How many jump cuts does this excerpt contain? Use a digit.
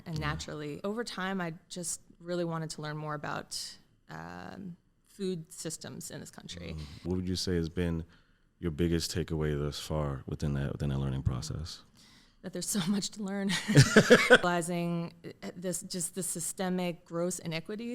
3